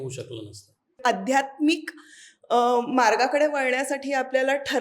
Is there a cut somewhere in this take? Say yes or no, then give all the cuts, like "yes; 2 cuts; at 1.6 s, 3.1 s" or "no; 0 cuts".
yes; 1 cut; at 1.0 s